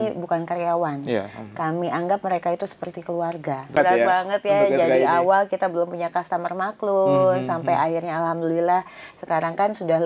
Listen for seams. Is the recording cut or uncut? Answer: cut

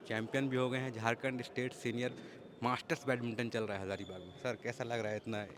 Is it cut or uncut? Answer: uncut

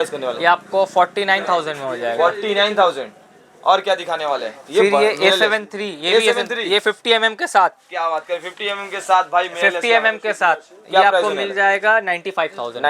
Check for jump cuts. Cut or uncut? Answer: uncut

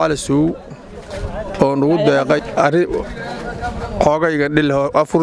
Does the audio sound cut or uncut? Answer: cut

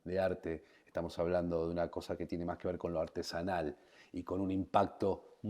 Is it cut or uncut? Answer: uncut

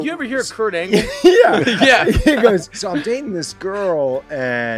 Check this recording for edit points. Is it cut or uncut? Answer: cut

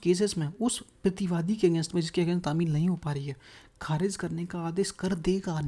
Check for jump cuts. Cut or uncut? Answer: uncut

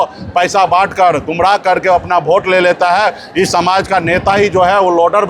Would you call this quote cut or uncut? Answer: uncut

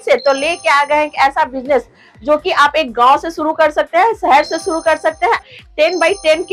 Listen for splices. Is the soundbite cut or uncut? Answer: uncut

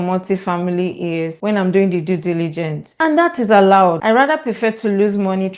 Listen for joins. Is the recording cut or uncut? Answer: cut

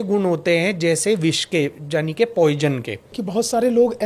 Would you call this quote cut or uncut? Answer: cut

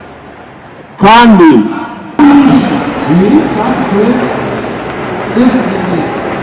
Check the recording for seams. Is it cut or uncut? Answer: cut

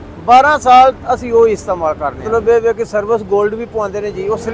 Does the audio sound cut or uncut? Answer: cut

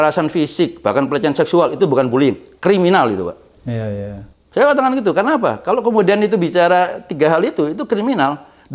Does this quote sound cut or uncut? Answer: uncut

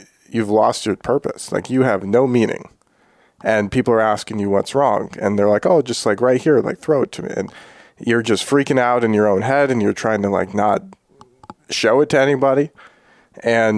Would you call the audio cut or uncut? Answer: uncut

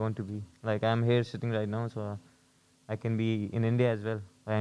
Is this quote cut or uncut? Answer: uncut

